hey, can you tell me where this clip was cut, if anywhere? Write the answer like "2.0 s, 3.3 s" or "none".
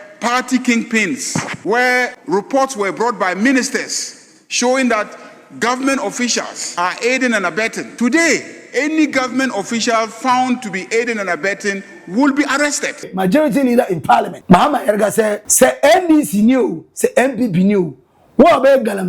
1.5 s, 2.2 s, 6.6 s, 7.8 s, 13.1 s, 14.3 s, 15.4 s